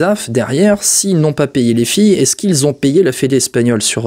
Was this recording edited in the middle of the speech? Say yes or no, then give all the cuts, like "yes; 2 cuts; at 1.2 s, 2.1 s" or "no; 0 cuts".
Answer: no; 0 cuts